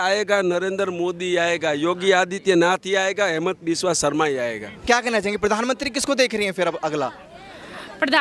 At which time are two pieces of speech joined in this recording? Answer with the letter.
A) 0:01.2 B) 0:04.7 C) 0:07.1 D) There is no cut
B